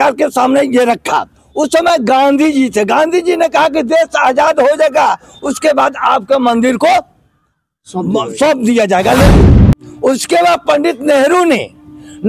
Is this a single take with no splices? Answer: no; 1 cut; at 9.5 s

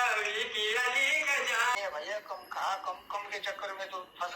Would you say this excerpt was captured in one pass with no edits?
no; 1 cut; at 1.8 s

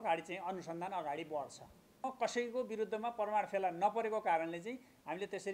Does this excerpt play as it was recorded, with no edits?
no; 1 cut; at 2.0 s

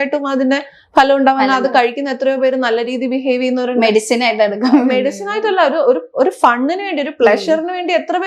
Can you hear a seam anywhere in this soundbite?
no; 0 cuts

